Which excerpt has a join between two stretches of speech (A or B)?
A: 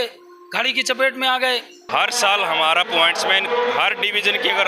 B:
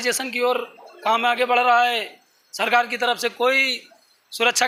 A